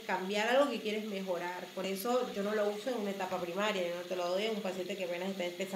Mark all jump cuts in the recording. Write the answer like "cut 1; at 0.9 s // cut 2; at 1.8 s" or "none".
none